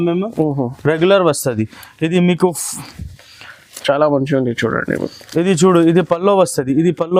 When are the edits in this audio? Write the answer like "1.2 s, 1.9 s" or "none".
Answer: none